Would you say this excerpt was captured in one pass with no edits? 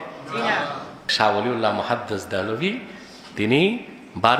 no; 1 cut; at 1.0 s

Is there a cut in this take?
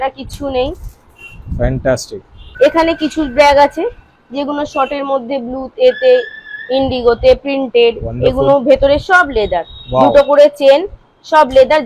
no; 0 cuts

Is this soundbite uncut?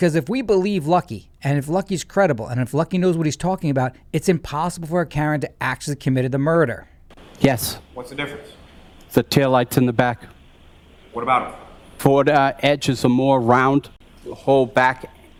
yes; 0 cuts

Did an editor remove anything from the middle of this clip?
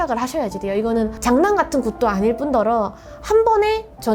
no; 0 cuts

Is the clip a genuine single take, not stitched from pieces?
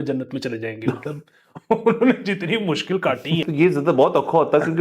no; 1 cut; at 3.4 s

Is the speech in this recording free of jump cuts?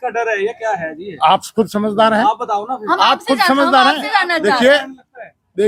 yes; 0 cuts

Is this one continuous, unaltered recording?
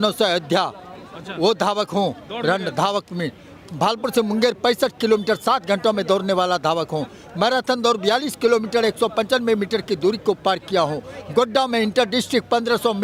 yes; 0 cuts

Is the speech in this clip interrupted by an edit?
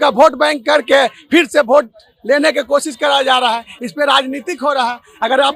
no; 0 cuts

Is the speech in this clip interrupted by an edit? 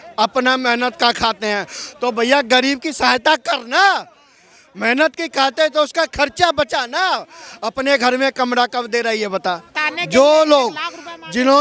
yes; 1 cut; at 9.8 s

